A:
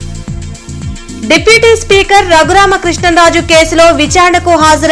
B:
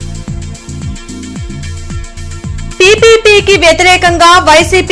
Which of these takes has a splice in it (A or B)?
B